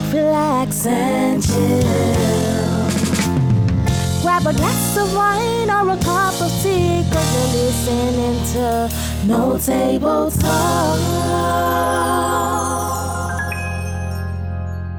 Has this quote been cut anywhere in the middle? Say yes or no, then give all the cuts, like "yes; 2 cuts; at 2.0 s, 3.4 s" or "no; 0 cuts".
no; 0 cuts